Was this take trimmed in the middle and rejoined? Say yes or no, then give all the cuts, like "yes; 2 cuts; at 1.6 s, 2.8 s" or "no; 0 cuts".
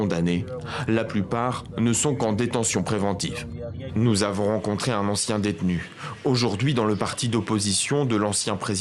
yes; 1 cut; at 4.2 s